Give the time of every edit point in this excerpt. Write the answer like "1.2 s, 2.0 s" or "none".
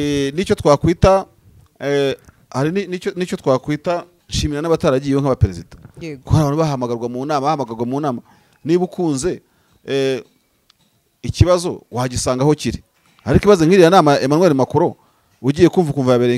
4.1 s